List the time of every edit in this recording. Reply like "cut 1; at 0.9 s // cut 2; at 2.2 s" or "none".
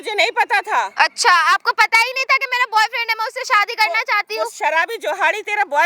none